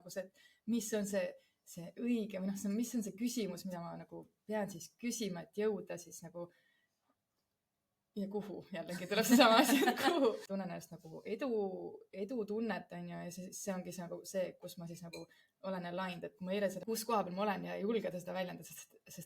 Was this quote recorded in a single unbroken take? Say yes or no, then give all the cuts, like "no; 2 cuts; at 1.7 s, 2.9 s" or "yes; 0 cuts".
no; 2 cuts; at 10.5 s, 16.8 s